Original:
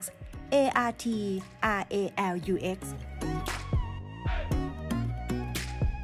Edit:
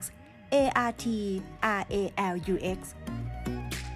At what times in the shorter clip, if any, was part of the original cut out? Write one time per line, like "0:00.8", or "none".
0:02.9